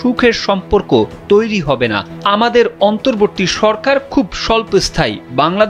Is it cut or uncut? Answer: uncut